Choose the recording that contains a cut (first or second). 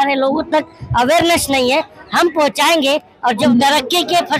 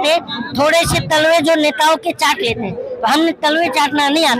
first